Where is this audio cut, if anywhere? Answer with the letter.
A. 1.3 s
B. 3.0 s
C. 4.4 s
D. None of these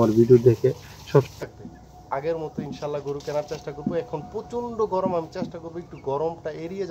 A